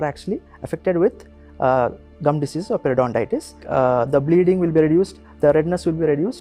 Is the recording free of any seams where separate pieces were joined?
no; 1 cut; at 3.6 s

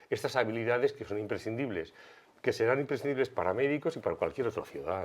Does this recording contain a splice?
no; 0 cuts

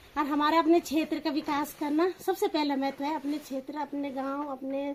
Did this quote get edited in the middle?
no; 0 cuts

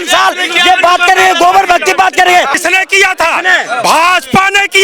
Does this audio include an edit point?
yes; 1 cut; at 2.6 s

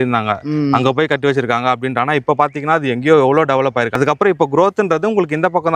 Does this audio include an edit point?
yes; 1 cut; at 3.9 s

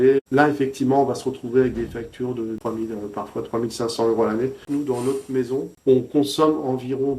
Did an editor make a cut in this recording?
yes; 3 cuts; at 2.6 s, 4.6 s, 5.7 s

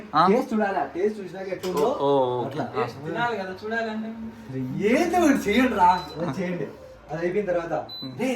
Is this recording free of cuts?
yes; 0 cuts

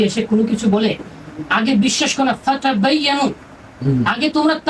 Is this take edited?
no; 0 cuts

